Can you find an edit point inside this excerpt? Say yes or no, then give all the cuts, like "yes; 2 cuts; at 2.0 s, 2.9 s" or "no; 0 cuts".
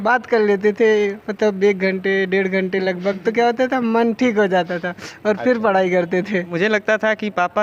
yes; 1 cut; at 6.5 s